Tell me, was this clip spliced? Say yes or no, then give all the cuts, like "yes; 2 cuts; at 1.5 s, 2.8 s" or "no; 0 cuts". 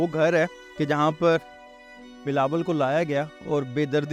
no; 0 cuts